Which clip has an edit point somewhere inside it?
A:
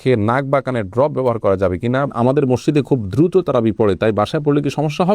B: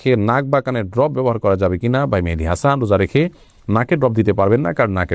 A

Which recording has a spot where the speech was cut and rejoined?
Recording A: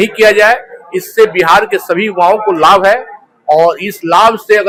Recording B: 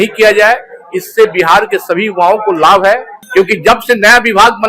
B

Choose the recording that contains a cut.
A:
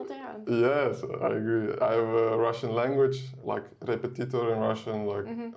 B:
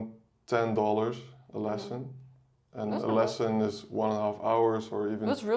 A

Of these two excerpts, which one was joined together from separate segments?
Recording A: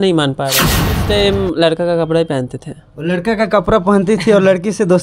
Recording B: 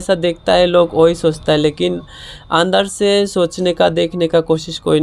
A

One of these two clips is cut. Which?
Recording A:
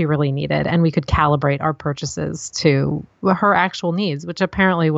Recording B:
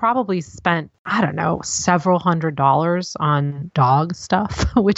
B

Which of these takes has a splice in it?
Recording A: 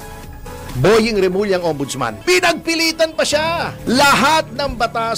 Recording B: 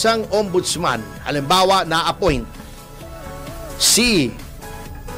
A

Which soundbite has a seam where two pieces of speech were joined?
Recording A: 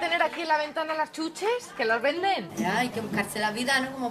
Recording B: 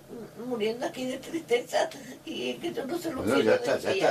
A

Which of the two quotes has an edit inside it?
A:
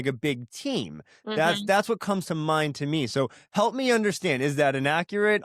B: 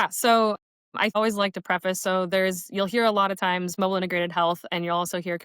B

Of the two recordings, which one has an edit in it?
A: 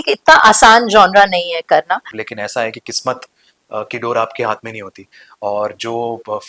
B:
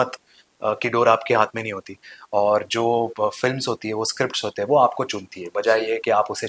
A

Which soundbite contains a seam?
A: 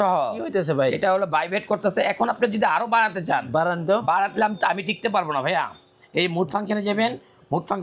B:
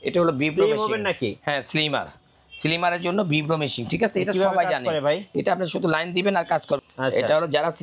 B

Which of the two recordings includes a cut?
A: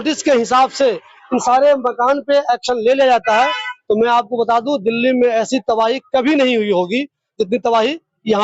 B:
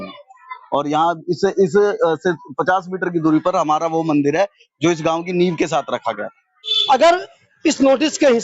B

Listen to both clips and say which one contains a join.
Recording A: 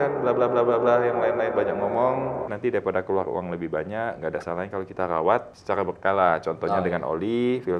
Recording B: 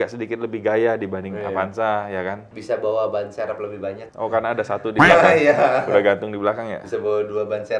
A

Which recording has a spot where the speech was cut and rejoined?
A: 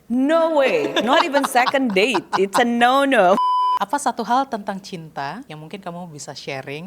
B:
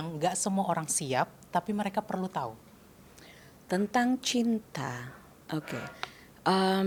A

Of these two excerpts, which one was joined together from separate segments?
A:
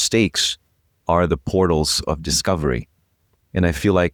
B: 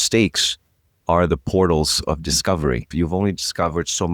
B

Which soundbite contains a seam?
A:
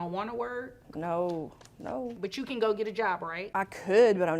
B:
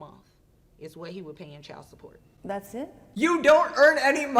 A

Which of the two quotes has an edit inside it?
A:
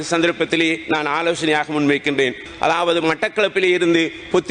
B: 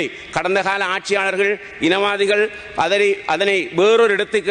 A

